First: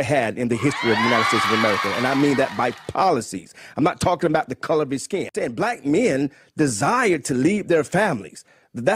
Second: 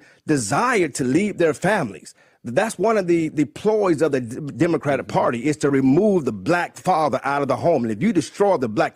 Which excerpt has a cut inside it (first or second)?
first